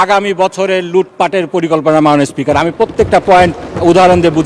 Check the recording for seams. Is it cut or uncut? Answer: uncut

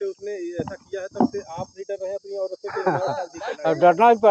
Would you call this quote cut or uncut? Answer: uncut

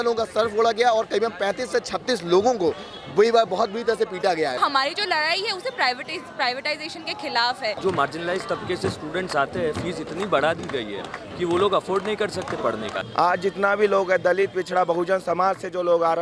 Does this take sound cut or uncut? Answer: cut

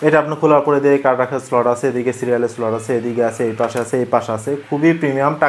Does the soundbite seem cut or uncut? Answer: uncut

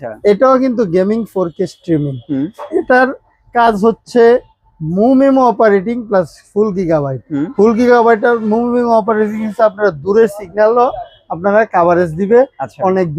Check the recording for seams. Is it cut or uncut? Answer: uncut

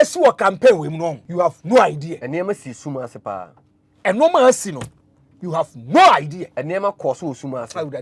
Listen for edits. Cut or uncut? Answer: cut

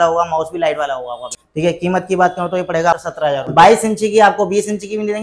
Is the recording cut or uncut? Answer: cut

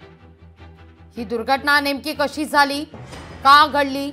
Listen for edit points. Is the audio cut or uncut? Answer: uncut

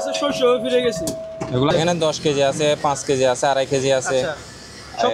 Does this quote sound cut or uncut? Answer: cut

